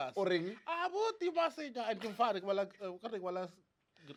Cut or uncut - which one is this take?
uncut